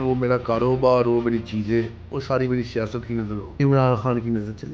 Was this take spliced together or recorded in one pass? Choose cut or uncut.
cut